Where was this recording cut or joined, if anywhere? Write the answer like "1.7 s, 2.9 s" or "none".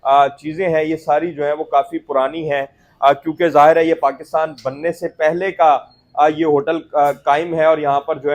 none